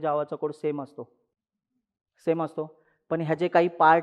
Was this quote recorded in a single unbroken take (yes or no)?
yes